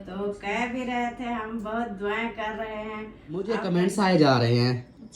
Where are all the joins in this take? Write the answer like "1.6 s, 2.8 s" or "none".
3.5 s